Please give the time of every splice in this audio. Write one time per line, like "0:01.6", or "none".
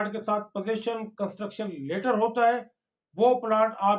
none